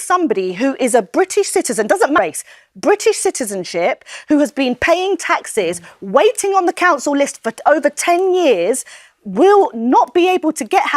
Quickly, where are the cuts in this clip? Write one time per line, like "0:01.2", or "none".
0:02.2